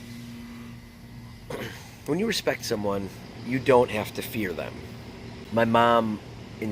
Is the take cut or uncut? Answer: cut